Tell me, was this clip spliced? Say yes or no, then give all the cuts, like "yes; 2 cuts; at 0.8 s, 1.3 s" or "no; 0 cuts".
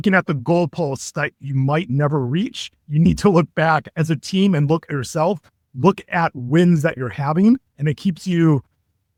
no; 0 cuts